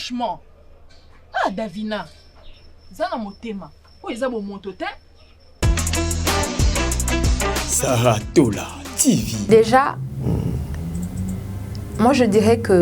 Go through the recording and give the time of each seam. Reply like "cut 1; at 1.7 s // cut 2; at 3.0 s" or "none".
cut 1; at 5.4 s // cut 2; at 9.5 s